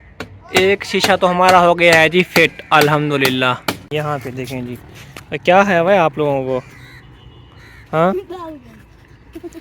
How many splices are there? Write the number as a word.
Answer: one